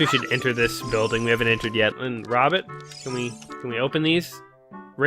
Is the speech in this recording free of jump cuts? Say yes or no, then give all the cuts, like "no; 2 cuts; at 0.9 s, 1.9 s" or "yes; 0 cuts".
no; 1 cut; at 1.9 s